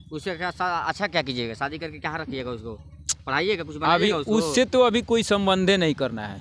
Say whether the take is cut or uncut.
uncut